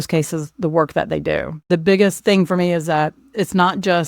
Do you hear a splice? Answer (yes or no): yes